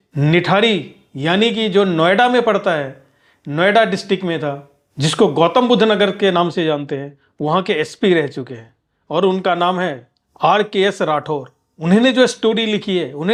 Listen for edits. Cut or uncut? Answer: uncut